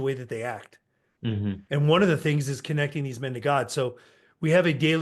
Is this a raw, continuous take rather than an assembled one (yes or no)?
no